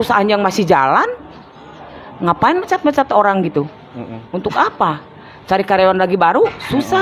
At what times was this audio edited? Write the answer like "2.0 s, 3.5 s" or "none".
none

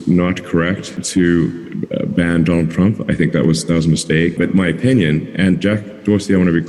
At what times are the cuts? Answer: 0.9 s, 4.3 s

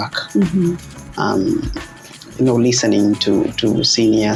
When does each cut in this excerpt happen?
none

